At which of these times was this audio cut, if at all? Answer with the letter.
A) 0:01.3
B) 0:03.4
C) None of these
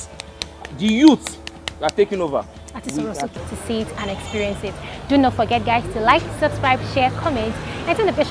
B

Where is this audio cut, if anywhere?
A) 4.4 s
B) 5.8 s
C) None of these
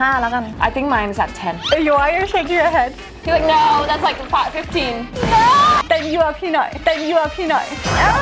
B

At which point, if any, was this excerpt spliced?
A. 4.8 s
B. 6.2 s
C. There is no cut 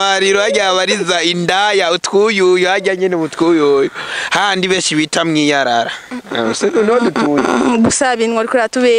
C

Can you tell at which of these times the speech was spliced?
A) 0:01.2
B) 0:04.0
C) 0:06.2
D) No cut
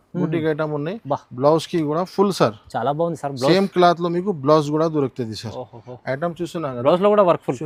D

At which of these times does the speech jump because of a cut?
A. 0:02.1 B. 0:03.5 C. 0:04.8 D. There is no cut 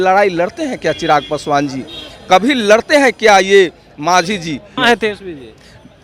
C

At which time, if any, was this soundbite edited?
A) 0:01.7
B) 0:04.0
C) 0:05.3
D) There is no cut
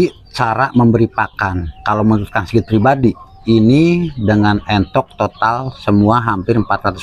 D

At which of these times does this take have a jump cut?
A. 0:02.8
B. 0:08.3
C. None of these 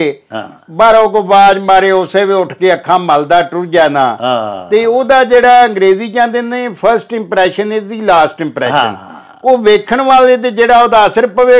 C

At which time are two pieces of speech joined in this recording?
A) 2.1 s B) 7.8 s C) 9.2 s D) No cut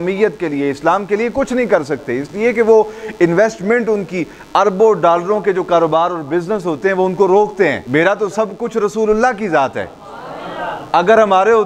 B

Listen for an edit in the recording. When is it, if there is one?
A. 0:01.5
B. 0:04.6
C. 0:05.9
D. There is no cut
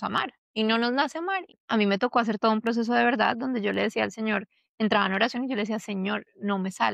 A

